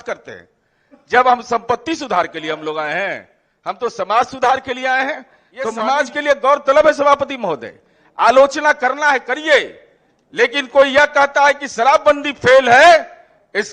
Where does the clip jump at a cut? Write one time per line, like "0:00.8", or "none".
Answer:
0:05.7